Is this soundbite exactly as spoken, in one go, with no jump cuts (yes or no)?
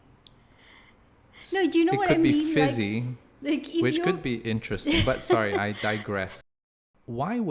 no